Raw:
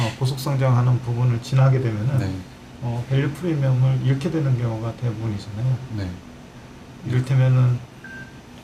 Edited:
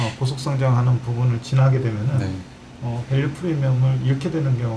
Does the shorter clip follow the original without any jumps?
yes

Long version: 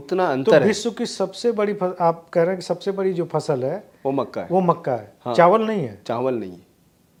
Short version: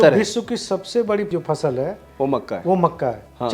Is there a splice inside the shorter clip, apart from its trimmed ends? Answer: yes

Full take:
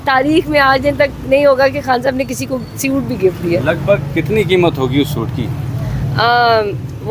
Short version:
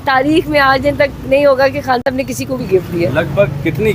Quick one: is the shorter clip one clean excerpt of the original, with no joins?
no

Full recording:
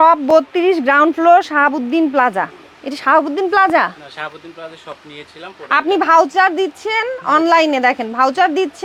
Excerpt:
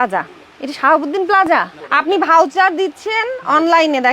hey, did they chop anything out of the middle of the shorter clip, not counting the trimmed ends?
yes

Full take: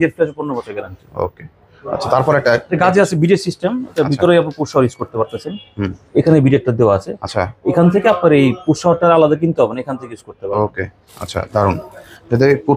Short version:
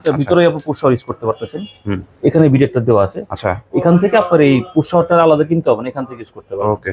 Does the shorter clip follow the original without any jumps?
yes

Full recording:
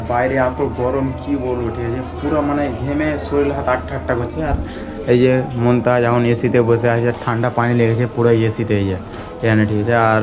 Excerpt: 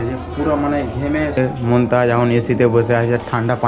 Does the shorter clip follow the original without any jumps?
no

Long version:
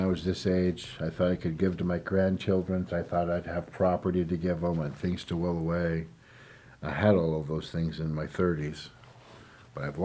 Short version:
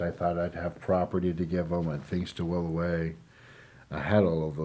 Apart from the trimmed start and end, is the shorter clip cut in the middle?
no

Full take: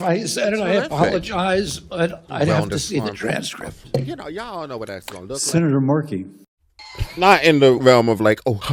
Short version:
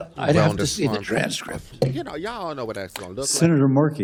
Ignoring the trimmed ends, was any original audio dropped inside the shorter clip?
no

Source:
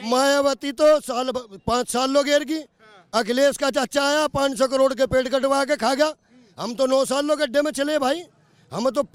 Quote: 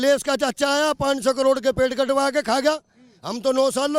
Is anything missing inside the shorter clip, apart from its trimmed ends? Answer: no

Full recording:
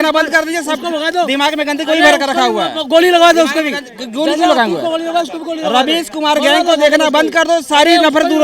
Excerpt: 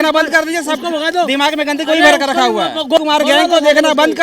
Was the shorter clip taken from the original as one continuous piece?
no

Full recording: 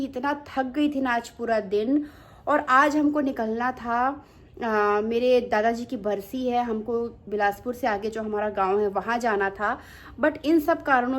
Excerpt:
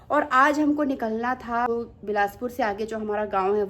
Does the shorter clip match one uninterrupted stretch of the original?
no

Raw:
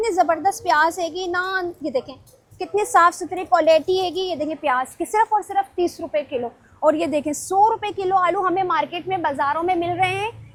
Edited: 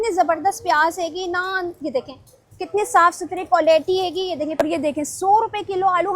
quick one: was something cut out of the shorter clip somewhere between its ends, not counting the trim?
yes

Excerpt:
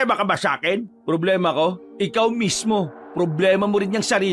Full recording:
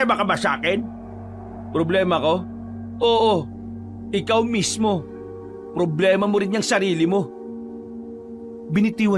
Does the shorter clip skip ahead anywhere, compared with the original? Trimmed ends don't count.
yes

